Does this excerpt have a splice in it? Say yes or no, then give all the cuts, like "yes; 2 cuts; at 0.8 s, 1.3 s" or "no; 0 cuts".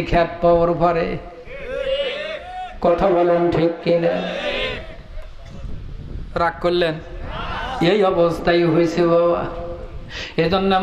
no; 0 cuts